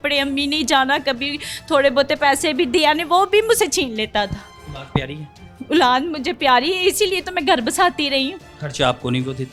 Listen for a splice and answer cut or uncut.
uncut